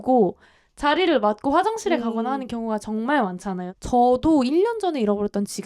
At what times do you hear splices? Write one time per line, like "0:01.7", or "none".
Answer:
0:03.7